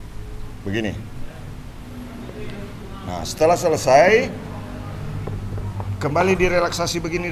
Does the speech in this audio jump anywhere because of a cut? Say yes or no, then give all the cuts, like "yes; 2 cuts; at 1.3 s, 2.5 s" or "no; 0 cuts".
no; 0 cuts